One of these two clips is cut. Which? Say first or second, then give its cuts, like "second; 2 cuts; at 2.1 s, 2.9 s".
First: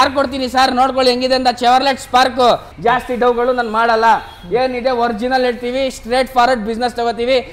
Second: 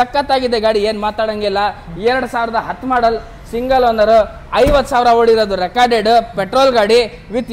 first; 1 cut; at 2.7 s